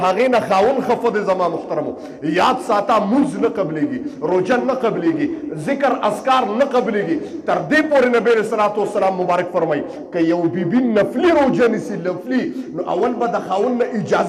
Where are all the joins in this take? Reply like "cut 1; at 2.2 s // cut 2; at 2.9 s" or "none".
none